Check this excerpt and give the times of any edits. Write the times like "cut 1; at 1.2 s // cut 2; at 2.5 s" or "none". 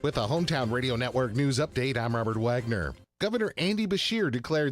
cut 1; at 3.0 s